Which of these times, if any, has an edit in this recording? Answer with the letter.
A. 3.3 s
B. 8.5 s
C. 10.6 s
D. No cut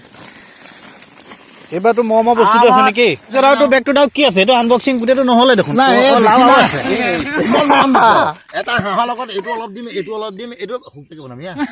A